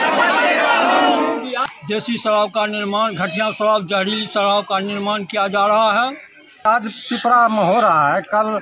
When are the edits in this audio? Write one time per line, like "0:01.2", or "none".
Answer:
0:01.6
0:06.7